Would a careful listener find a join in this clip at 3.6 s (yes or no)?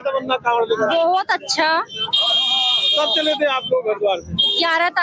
yes